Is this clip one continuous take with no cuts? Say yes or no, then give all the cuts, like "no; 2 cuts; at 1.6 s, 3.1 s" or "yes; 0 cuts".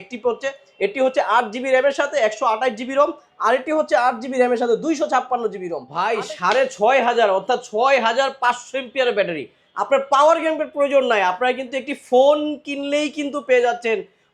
no; 1 cut; at 5.9 s